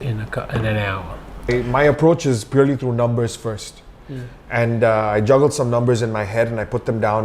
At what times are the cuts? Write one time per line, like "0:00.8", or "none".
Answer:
0:01.5